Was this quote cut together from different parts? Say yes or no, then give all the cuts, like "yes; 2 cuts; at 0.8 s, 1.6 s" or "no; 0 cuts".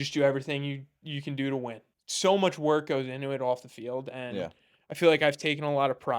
yes; 1 cut; at 1.9 s